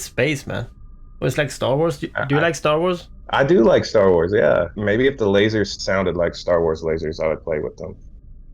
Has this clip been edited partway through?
yes; 3 cuts; at 3.1 s, 4.8 s, 5.8 s

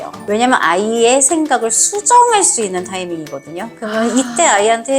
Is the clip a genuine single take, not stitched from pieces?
yes; 0 cuts

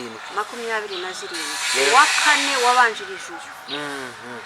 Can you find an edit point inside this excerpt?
no; 0 cuts

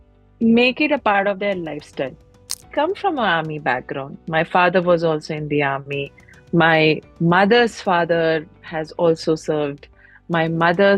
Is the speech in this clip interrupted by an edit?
yes; 1 cut; at 2.7 s

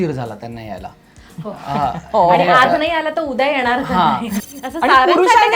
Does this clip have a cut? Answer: yes; 1 cut; at 4.4 s

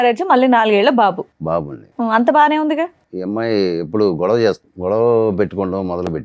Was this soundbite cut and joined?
yes; 2 cuts; at 3.1 s, 4.7 s

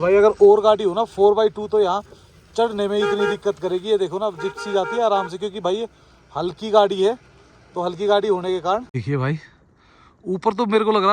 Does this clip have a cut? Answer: yes; 1 cut; at 8.9 s

